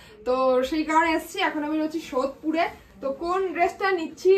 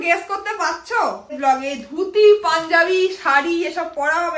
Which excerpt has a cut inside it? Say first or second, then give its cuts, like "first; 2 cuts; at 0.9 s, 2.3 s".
second; 1 cut; at 1.4 s